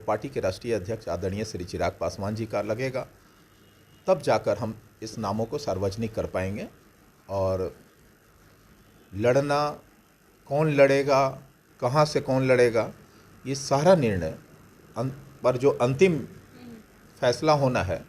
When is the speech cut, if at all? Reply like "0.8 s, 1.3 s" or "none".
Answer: none